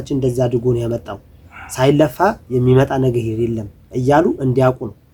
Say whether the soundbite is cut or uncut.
uncut